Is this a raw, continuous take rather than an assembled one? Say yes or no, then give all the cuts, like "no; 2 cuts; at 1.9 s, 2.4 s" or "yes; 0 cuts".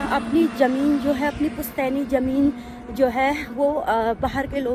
yes; 0 cuts